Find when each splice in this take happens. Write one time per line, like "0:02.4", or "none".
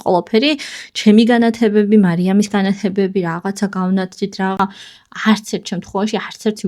0:04.6